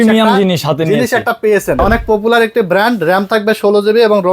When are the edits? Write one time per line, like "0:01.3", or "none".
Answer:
0:01.8